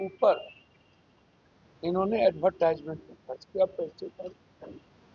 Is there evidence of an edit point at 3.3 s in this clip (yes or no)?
no